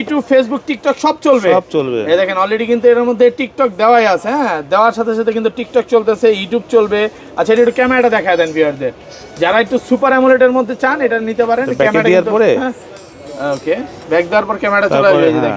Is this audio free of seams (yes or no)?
yes